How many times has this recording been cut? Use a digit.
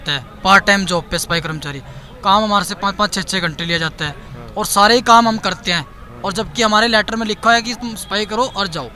1